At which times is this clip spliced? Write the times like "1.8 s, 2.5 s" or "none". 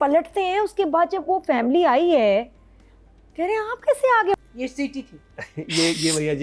4.3 s